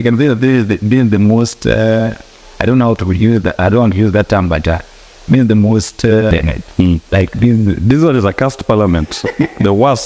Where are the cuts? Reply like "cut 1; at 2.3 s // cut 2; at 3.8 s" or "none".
cut 1; at 6.3 s

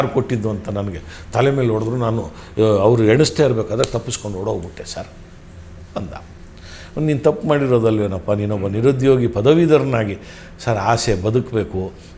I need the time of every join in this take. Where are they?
none

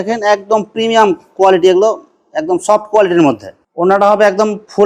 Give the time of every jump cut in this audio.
none

